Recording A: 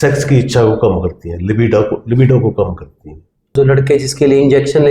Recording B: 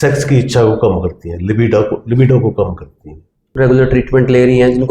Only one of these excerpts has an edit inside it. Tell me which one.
A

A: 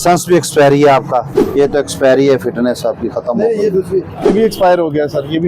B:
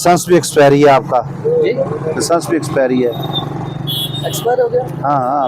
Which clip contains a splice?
A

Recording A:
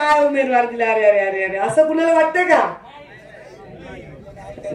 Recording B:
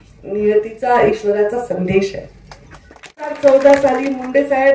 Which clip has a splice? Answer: B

